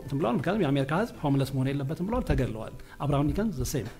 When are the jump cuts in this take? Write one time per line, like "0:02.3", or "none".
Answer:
none